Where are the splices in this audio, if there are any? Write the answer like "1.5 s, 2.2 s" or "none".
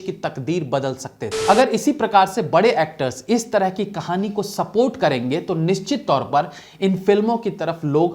1.3 s